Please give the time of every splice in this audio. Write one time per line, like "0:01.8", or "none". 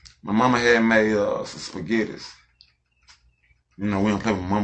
none